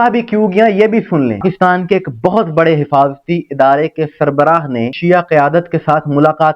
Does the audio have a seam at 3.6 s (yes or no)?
no